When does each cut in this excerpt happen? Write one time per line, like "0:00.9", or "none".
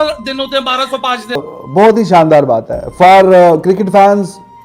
0:01.3